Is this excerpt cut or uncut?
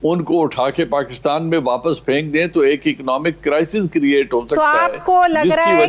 uncut